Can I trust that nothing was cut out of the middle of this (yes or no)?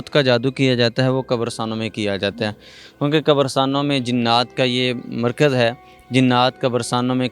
yes